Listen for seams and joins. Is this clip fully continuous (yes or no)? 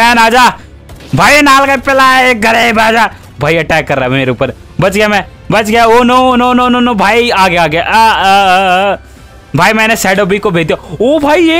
yes